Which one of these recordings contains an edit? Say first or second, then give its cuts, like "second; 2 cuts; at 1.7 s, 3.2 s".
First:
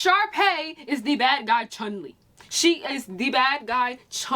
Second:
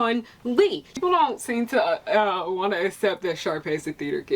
second; 1 cut; at 0.9 s